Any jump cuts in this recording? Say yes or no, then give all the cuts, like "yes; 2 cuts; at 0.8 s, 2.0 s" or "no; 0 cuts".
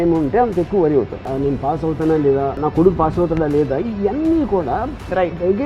yes; 2 cuts; at 1.3 s, 2.6 s